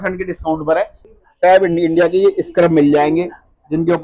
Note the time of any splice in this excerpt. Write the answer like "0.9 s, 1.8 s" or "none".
1.0 s